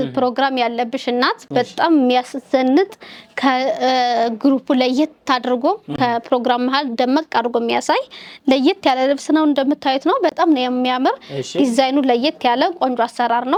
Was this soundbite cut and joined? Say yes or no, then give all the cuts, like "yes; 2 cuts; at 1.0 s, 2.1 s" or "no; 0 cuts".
no; 0 cuts